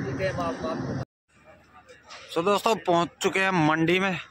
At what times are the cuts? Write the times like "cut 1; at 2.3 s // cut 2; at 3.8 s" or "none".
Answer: cut 1; at 1.0 s

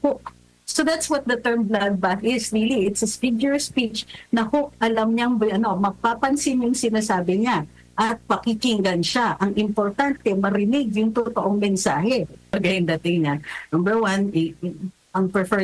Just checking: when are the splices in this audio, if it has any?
cut 1; at 12.5 s

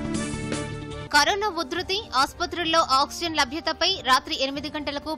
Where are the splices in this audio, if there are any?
none

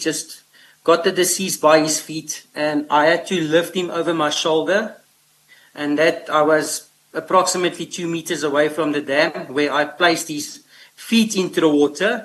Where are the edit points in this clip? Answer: none

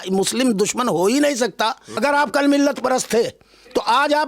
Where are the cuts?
cut 1; at 1.9 s

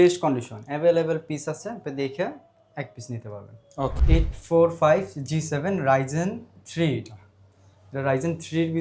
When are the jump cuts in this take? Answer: cut 1; at 4.0 s

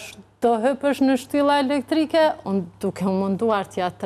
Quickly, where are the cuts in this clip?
cut 1; at 2.4 s

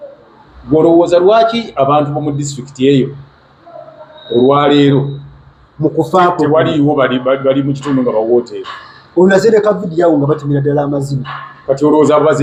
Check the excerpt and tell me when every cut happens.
none

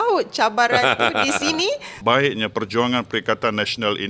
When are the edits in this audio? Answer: cut 1; at 1.9 s

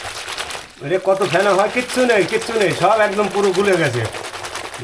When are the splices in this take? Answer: none

